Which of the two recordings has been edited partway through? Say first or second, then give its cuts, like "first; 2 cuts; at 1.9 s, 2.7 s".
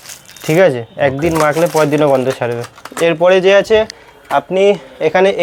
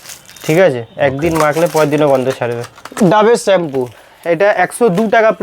second; 1 cut; at 3.0 s